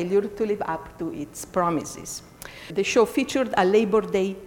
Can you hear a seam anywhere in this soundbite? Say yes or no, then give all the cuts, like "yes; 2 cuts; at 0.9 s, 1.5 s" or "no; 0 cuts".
yes; 1 cut; at 2.7 s